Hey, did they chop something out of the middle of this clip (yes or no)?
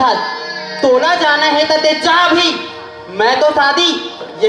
no